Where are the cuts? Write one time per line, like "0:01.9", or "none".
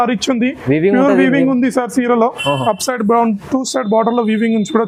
none